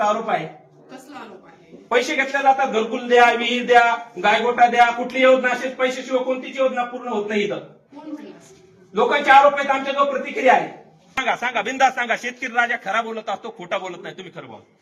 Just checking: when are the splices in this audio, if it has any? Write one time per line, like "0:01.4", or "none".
0:11.2